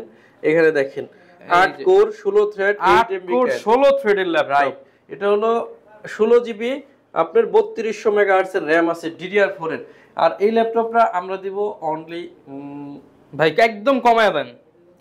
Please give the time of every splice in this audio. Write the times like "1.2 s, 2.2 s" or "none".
none